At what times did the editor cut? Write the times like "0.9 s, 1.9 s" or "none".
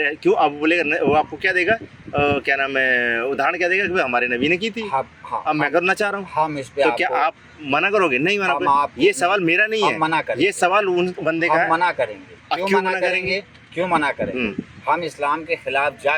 none